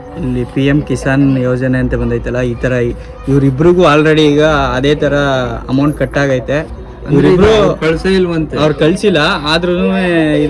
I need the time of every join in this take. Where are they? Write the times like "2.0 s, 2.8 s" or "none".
none